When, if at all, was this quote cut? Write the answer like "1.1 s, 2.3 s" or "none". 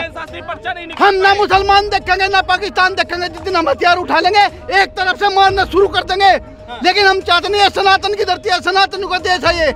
none